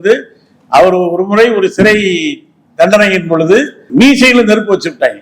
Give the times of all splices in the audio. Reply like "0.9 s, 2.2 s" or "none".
3.9 s